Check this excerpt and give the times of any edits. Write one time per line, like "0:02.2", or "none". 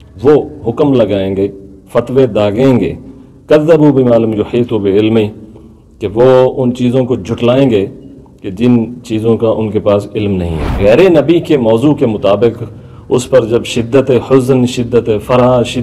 0:10.6

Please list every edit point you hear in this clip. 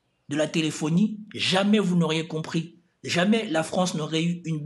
none

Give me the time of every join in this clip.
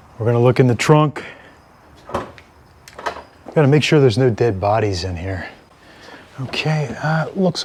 none

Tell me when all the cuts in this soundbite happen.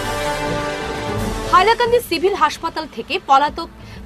0:01.0

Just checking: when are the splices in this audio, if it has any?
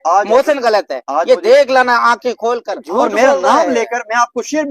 0:02.7

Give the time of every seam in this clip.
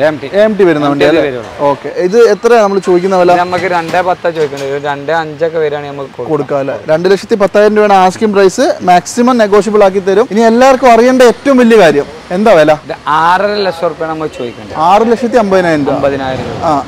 0:01.9
0:10.3
0:12.9

